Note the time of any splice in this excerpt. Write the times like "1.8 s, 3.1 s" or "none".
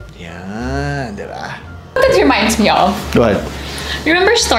1.9 s

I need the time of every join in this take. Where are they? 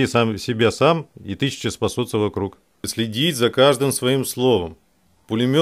2.9 s

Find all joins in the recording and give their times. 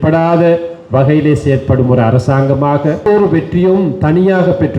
3.0 s

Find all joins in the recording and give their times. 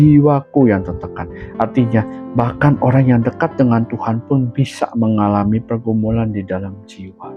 none

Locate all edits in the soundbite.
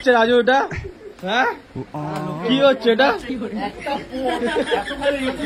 1.9 s, 3.5 s

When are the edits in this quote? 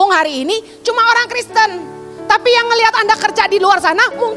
none

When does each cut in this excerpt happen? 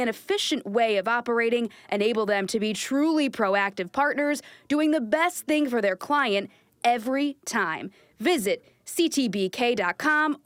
none

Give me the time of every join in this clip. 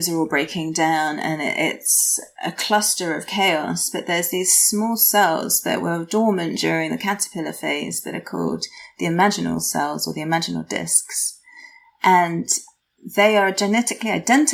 none

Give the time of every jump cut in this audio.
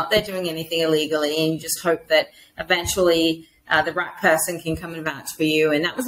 none

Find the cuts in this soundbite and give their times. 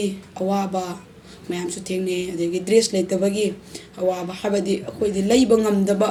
none

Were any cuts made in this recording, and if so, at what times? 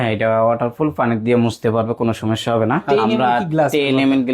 2.9 s

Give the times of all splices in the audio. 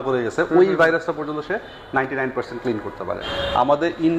3.2 s

